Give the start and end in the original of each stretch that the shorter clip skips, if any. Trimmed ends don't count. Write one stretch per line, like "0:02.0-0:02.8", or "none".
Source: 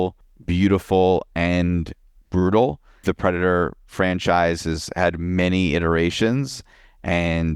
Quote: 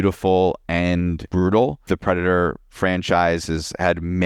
0:01.9-0:02.2
0:02.8-0:03.0